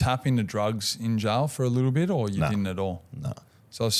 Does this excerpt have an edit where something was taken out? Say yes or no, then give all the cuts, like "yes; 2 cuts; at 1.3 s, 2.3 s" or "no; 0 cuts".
no; 0 cuts